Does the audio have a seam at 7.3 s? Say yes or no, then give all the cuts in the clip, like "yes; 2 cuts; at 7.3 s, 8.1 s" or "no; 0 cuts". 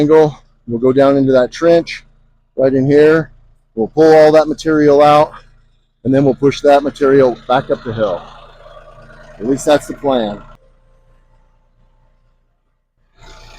no; 1 cut; at 10.6 s